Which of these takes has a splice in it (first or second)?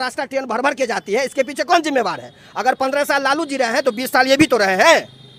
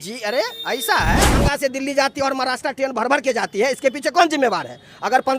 second